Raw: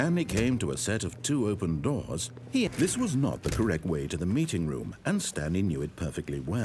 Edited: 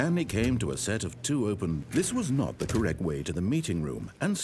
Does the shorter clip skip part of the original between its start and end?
yes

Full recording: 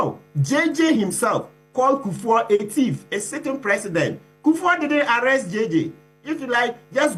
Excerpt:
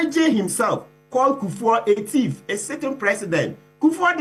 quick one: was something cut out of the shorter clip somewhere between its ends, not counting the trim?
no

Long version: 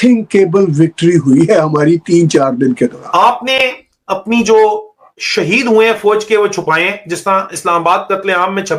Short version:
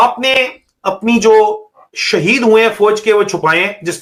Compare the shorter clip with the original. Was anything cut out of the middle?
no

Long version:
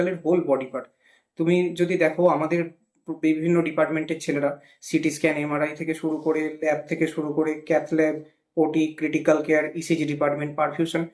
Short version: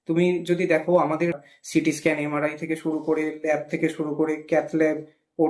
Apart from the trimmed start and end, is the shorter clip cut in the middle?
yes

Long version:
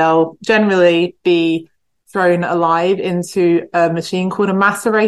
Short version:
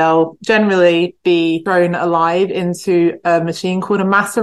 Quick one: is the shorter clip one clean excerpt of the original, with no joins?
no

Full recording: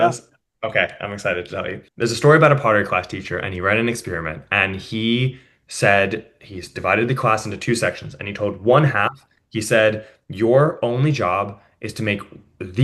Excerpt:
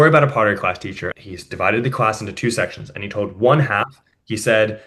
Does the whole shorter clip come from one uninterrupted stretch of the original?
no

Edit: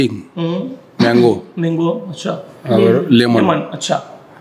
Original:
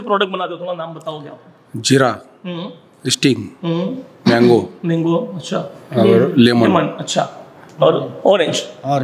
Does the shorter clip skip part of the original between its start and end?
no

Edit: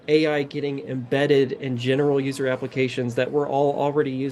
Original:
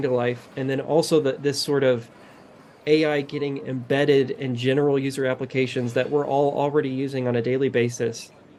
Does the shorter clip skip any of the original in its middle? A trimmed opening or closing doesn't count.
no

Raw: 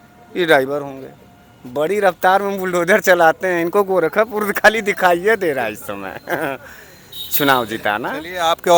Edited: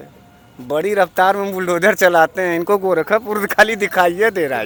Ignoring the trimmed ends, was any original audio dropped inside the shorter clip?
no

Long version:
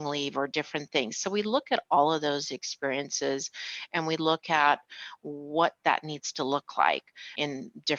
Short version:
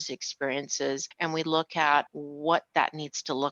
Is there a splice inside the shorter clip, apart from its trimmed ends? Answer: yes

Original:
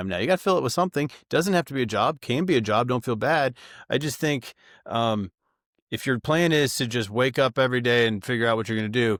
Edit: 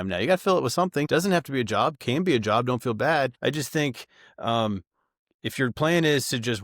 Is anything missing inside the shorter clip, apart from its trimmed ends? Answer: yes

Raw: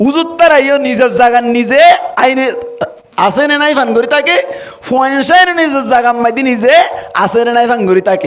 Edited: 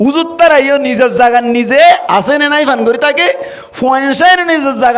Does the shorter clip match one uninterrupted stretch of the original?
no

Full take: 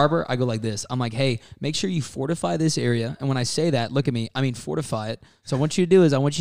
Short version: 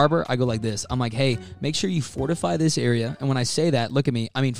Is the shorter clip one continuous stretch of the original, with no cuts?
yes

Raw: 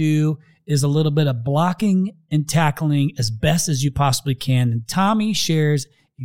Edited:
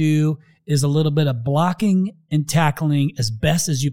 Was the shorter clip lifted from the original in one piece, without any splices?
yes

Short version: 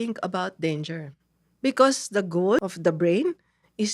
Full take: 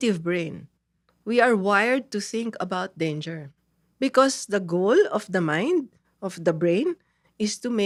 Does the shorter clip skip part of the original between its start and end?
yes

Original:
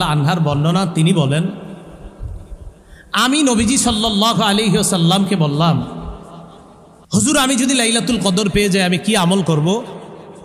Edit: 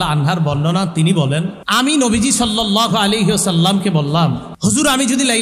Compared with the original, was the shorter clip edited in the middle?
yes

